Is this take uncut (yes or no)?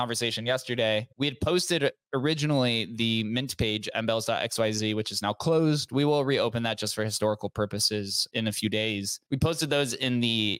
no